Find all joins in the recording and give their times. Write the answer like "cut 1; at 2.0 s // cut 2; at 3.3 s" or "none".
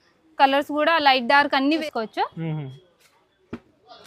cut 1; at 1.8 s